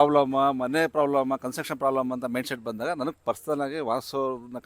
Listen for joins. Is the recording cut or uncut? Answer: uncut